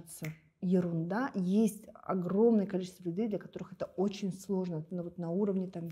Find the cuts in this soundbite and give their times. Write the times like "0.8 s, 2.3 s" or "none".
none